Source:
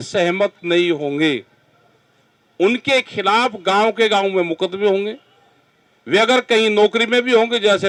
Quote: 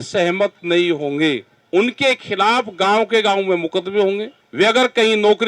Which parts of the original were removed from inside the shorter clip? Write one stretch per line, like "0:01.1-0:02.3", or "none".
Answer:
0:01.5-0:02.4
0:05.2-0:05.9